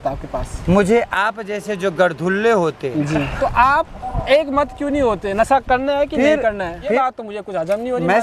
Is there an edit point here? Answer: yes; 2 cuts; at 3.3 s, 7.0 s

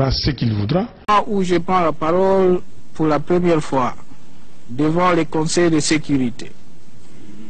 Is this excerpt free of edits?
no; 1 cut; at 1.0 s

